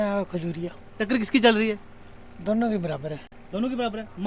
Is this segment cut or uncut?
uncut